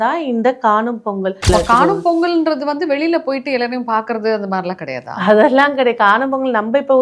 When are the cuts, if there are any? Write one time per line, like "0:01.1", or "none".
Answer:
0:01.5

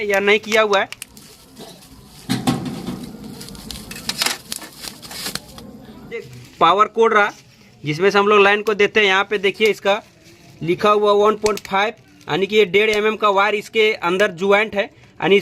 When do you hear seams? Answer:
none

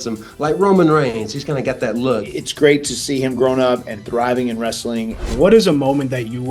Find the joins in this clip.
0:02.4
0:05.2

